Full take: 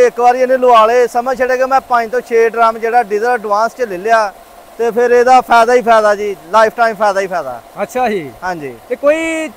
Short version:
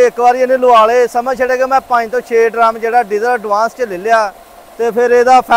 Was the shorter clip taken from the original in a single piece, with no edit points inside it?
yes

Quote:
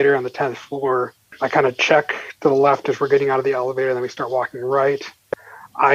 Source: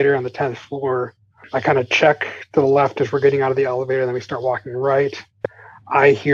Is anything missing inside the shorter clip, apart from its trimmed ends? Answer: yes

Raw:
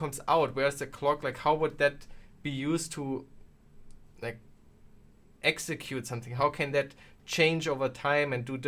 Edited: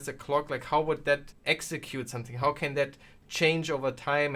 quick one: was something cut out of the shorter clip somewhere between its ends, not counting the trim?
yes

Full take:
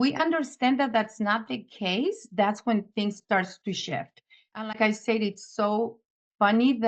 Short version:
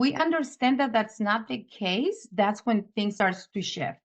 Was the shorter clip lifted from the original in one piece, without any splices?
no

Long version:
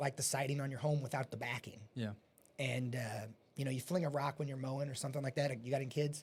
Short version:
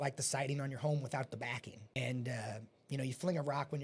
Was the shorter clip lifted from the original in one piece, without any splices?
no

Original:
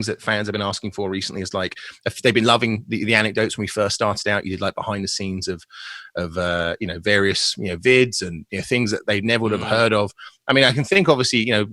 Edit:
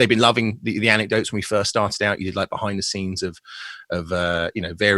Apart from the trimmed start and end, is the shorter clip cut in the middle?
no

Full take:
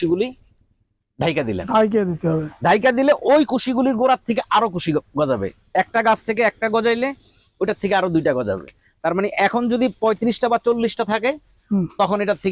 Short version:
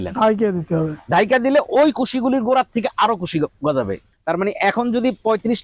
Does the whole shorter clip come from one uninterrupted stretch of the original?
no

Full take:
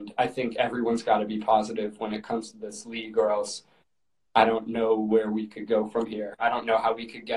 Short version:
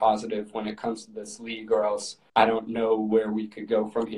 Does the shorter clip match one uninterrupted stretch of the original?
no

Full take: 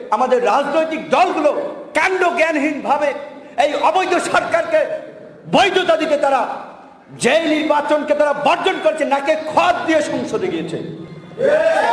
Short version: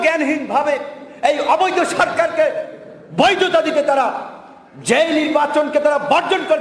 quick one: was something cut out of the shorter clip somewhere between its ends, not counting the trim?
no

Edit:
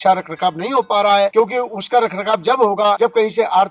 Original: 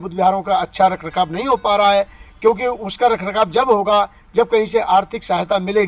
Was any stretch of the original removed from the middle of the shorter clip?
yes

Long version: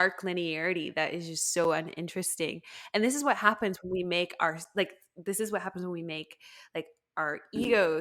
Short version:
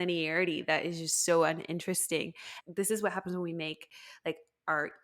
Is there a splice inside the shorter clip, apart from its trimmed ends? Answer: yes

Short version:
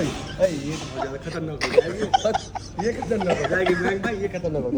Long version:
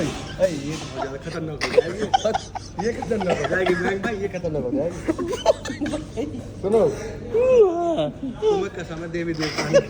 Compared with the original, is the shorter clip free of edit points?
yes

